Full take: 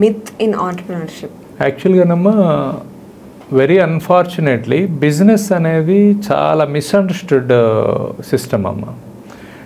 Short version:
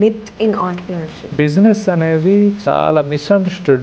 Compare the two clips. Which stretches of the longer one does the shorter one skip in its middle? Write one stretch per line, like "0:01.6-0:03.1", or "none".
0:01.3-0:04.9

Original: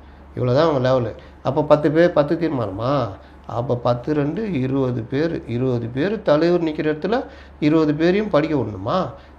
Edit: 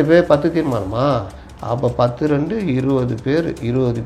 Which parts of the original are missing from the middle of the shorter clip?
none

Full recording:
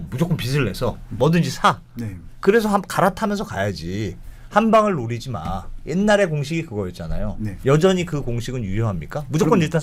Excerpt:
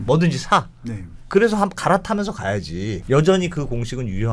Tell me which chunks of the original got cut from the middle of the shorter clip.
0:04.1-0:07.6

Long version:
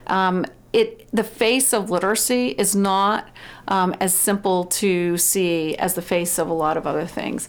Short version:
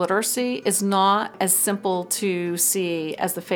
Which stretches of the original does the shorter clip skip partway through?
0:03.3-0:03.9

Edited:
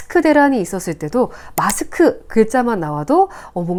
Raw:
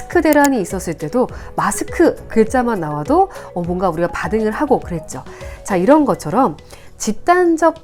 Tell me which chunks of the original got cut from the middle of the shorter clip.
none

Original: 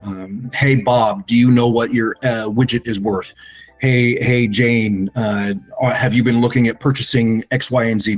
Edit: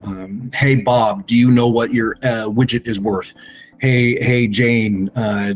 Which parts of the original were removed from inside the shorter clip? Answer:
none

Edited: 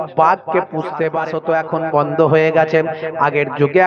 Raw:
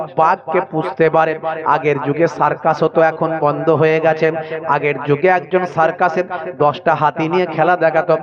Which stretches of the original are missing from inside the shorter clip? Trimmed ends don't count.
0:01.3-0:02.8

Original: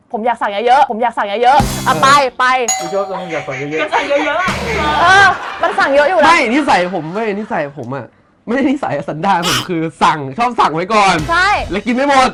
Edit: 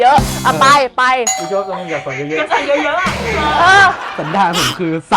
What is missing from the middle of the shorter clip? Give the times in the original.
0:05.5-0:09.0

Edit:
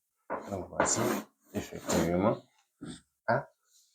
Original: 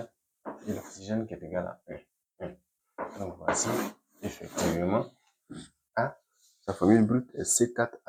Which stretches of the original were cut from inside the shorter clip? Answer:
none

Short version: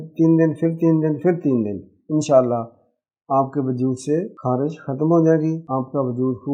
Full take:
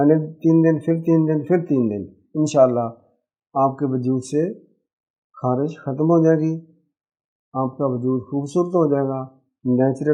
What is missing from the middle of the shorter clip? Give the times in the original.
0:04.6-0:05.3
0:06.6-0:07.5

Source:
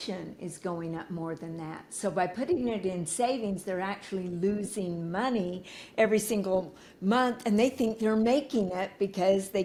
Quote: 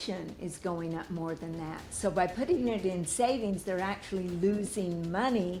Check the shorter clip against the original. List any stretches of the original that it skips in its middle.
none

